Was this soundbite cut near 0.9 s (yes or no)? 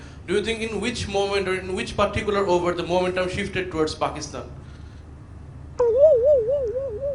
no